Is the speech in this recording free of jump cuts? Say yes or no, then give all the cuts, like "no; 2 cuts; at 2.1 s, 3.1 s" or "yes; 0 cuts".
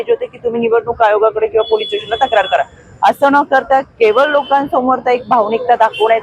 yes; 0 cuts